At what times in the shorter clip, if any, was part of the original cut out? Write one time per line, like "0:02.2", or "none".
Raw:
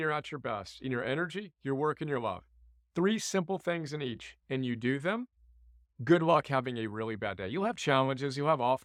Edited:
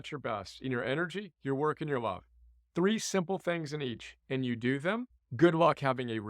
0:05.2